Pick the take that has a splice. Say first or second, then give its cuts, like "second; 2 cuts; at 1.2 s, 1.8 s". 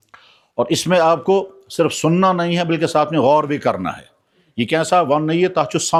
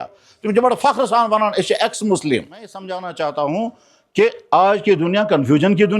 second; 1 cut; at 2.9 s